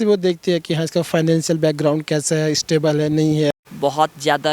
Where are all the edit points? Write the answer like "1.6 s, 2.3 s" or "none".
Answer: 3.5 s